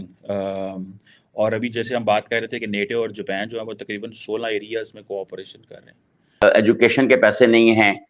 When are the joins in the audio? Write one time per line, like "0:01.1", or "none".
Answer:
0:06.4